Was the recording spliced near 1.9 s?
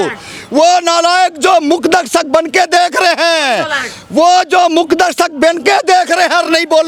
no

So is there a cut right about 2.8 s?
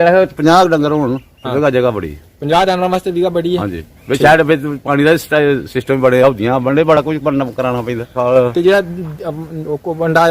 no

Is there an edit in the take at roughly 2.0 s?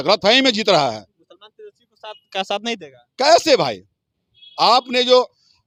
no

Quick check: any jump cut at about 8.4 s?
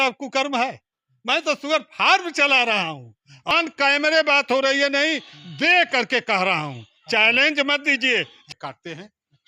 yes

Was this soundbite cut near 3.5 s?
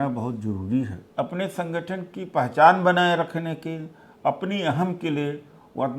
no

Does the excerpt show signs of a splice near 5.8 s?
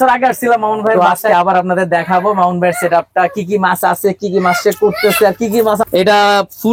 yes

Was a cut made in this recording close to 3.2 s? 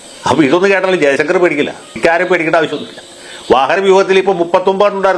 no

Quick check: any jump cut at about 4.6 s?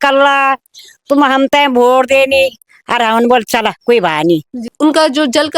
yes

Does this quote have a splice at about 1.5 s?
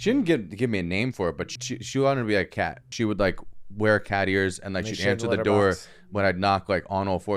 yes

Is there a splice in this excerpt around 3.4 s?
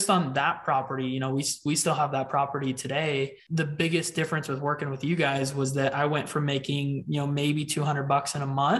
yes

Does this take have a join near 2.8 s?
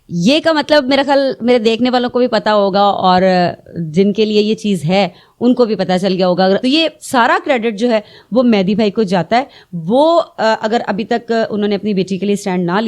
no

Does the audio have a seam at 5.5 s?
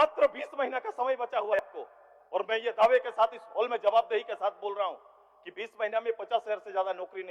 no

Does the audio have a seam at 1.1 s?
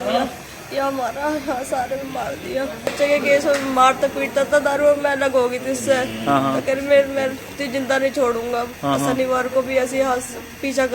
no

